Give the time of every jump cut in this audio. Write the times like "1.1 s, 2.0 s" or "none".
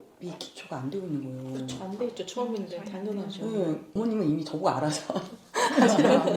3.9 s